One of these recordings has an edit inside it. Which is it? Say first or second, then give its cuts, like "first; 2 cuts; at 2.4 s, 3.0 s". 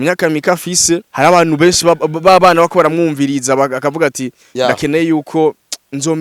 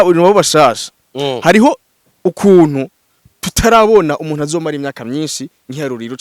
first; 1 cut; at 1.1 s